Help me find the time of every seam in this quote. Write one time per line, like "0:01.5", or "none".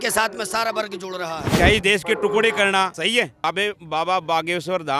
0:01.4
0:03.1